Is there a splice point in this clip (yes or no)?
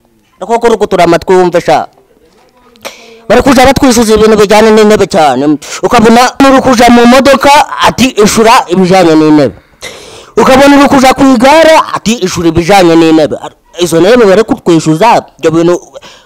yes